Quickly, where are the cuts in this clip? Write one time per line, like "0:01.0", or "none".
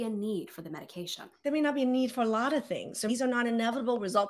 0:01.2
0:03.1